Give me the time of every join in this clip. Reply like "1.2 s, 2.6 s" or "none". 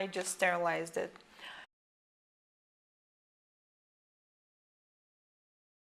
none